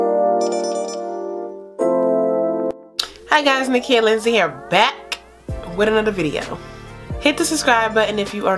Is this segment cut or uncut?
cut